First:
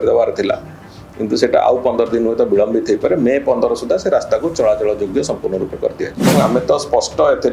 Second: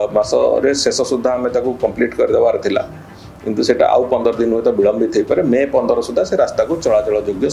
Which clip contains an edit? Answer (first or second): first